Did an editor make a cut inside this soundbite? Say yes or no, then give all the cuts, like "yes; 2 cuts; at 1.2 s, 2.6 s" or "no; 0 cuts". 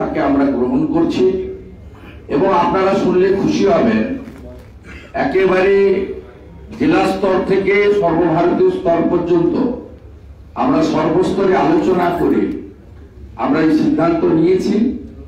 no; 0 cuts